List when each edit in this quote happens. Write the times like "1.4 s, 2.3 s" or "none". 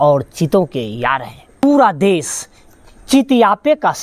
1.6 s